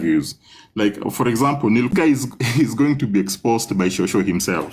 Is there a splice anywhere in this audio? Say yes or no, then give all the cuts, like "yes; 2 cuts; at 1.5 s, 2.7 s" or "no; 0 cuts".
yes; 1 cut; at 1.9 s